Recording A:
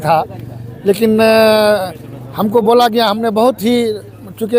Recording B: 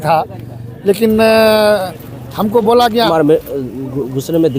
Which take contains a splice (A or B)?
B